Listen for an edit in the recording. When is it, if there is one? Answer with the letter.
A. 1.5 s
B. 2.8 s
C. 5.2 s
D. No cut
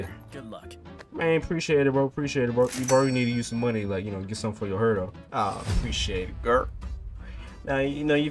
C